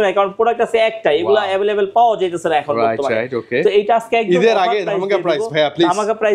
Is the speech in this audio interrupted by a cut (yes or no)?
no